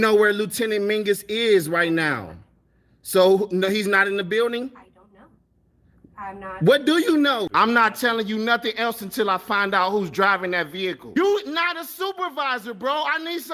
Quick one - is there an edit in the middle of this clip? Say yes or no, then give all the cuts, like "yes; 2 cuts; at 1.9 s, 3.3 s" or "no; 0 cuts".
yes; 1 cut; at 7.5 s